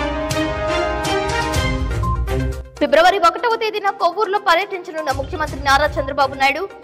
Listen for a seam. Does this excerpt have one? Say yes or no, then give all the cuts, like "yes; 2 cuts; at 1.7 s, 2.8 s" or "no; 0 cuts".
yes; 1 cut; at 2.2 s